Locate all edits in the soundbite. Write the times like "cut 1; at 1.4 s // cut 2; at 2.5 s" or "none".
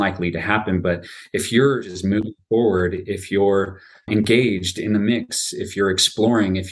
none